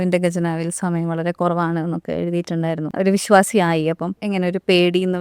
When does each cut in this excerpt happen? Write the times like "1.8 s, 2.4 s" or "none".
2.9 s, 4.2 s